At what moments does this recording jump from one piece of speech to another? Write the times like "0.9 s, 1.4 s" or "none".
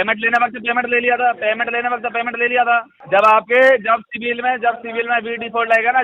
2.9 s